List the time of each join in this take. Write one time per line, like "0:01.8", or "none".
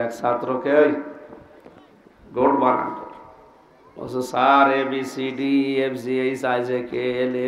none